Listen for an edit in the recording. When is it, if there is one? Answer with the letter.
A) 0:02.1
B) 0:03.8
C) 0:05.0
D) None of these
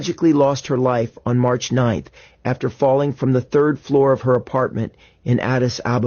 D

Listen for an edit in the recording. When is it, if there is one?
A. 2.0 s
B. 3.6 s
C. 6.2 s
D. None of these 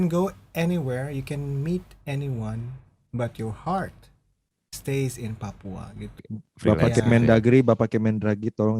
C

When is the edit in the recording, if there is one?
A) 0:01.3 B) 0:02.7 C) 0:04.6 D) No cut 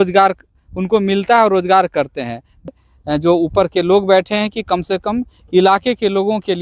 B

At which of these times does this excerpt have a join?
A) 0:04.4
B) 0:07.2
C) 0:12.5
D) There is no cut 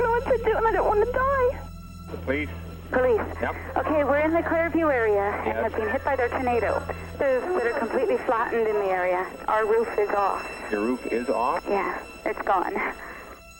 B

